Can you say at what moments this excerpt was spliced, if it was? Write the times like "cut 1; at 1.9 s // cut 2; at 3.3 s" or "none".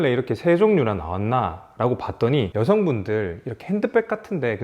cut 1; at 2.5 s